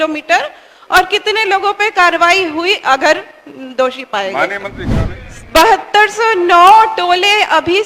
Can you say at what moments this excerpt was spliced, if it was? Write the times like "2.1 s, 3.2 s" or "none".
4.8 s